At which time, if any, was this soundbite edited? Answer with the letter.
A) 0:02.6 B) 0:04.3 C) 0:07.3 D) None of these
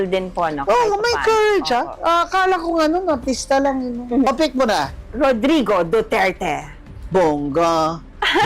B